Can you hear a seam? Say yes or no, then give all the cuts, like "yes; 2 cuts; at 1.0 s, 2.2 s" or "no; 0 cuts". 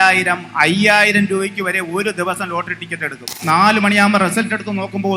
yes; 1 cut; at 3.4 s